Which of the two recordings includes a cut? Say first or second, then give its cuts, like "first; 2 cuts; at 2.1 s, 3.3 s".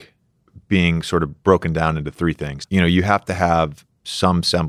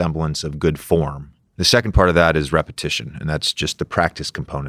first; 1 cut; at 2.2 s